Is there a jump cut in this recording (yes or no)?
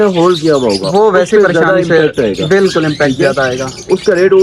no